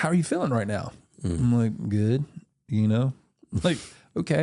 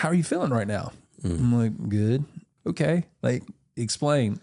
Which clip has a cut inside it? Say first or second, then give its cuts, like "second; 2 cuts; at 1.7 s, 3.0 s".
second; 1 cut; at 2.4 s